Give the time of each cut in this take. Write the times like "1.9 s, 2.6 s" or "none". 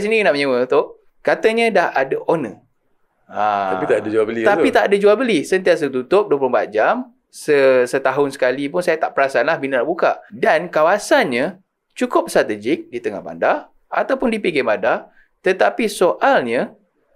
1.0 s, 10.3 s